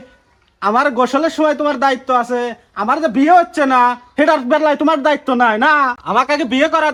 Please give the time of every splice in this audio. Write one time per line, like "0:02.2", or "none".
none